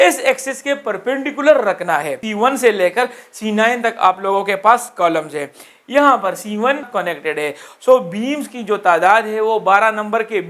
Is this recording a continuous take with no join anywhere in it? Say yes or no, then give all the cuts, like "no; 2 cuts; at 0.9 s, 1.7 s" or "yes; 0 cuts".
no; 2 cuts; at 2.2 s, 6.9 s